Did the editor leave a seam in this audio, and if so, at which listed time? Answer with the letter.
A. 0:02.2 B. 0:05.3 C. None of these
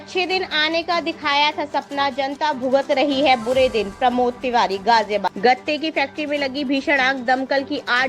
B